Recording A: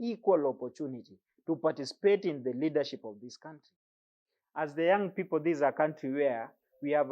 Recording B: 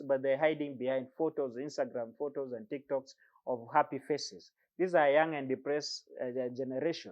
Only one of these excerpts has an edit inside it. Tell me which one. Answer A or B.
A